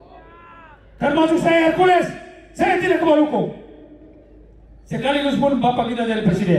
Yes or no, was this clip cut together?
no